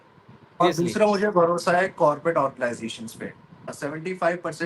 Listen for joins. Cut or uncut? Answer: cut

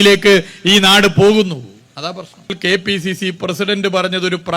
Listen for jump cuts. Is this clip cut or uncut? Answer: cut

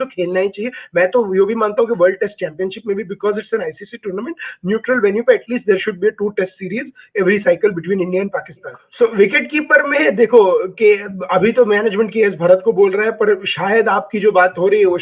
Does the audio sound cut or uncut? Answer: cut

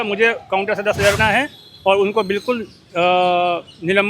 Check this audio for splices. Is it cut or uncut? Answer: cut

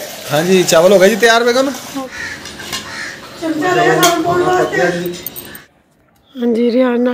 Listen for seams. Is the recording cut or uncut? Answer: cut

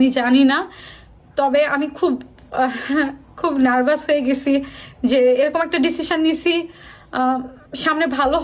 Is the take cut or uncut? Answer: uncut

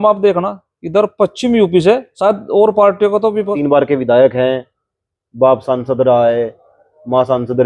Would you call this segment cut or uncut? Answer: cut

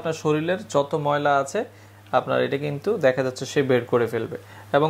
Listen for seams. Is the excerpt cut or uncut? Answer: uncut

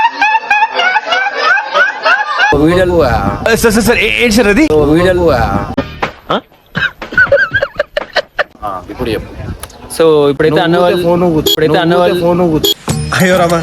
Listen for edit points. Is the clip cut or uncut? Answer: cut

